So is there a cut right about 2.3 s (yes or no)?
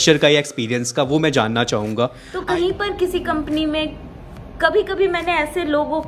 yes